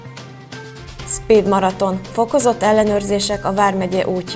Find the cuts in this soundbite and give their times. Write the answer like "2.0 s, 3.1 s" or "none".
none